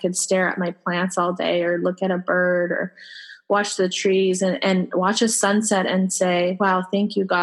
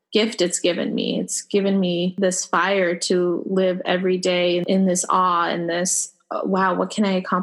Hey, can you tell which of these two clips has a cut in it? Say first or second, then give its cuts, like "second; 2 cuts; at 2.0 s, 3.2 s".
second; 2 cuts; at 2.1 s, 4.6 s